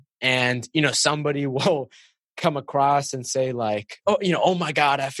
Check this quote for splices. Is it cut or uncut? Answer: cut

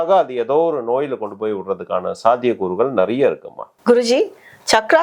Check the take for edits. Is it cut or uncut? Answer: uncut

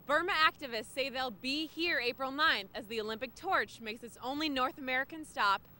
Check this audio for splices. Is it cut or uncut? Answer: uncut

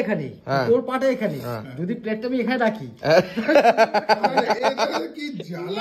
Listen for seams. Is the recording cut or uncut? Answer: uncut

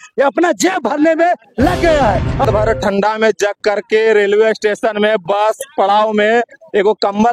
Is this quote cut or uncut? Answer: cut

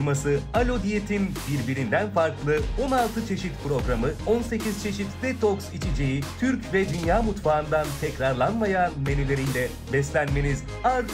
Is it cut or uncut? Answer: uncut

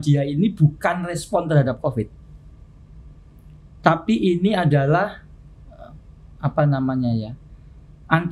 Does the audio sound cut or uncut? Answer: uncut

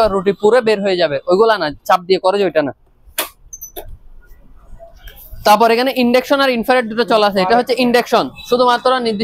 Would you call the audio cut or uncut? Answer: uncut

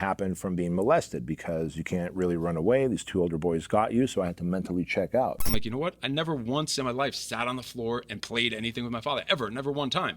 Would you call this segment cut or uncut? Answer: cut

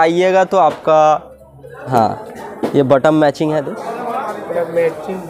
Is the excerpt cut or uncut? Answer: cut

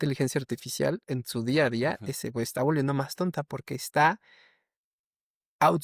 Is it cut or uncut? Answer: uncut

